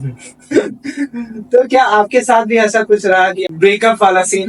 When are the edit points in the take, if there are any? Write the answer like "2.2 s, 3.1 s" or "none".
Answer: 3.5 s